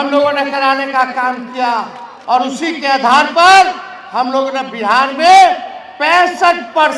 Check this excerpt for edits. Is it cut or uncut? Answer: uncut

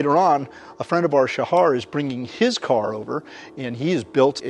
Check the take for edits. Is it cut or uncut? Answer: uncut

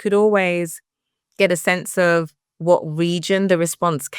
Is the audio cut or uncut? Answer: uncut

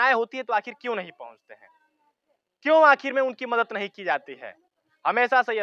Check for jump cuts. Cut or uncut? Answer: uncut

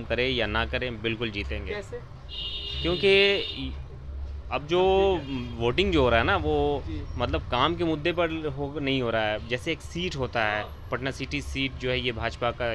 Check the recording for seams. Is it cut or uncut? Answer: uncut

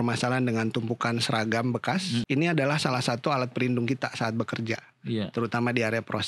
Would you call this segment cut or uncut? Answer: cut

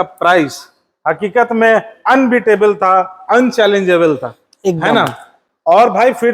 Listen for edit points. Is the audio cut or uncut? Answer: uncut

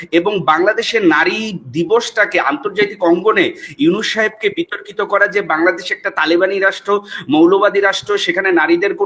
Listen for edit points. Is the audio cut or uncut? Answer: uncut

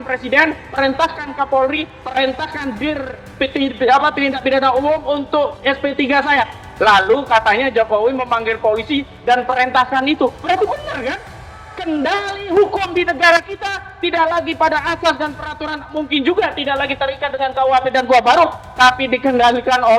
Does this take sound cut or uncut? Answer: uncut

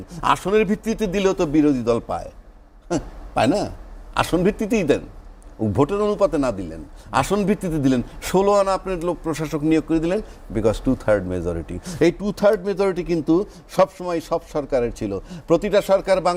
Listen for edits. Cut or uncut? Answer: uncut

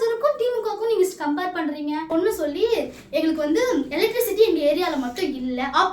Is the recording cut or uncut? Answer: cut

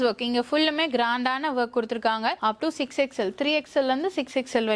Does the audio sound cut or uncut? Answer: uncut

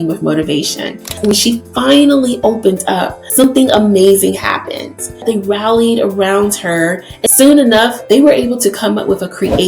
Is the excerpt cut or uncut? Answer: cut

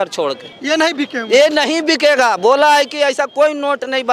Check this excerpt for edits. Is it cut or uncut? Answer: uncut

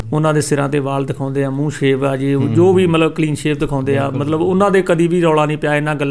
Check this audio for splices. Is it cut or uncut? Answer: uncut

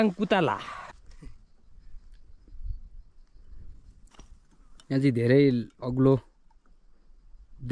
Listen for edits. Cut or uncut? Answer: cut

